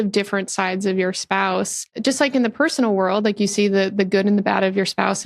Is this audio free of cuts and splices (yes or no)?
no